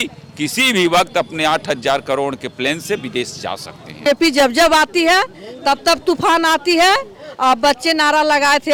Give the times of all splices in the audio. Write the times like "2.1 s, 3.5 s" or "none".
4.0 s